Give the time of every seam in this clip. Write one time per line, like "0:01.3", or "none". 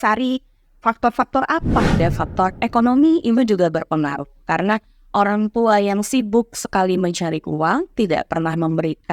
0:02.0

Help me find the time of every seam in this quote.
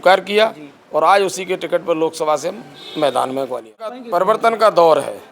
0:04.0

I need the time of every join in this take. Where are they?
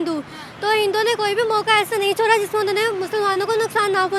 none

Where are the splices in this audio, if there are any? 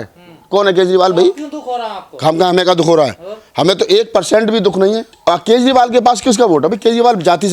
0:05.1

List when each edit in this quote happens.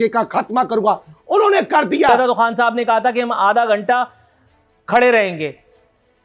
0:02.1

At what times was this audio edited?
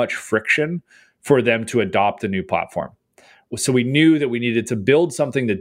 0:03.5

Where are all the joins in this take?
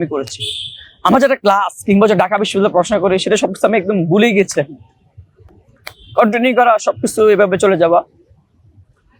none

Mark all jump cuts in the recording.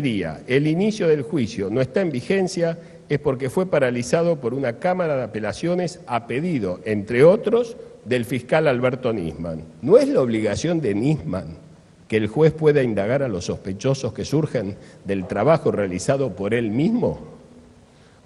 none

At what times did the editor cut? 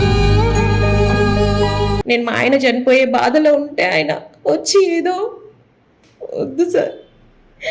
0:02.0

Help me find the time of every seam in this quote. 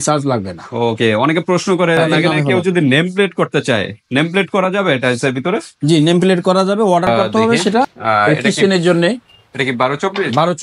0:02.1
0:08.0

